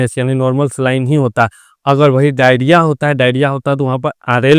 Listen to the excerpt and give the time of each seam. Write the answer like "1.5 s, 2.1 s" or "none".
none